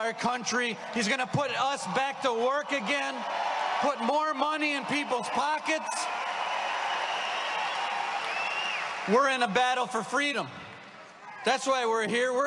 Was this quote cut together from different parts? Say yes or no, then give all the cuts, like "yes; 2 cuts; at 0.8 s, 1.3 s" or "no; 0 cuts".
no; 0 cuts